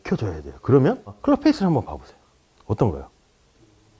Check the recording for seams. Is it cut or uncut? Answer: uncut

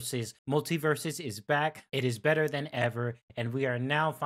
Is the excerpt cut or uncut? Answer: uncut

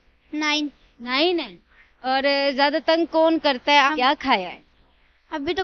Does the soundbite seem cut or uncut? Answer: cut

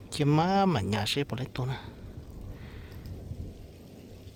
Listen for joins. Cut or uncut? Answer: uncut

